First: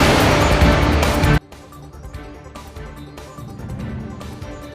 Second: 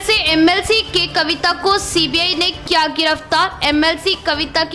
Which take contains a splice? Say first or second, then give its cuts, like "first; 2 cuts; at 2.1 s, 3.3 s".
first; 1 cut; at 1.0 s